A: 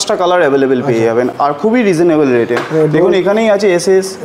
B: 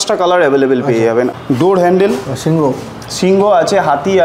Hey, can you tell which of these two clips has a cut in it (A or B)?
B